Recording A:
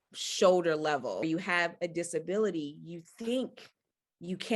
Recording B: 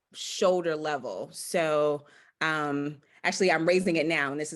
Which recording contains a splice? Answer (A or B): A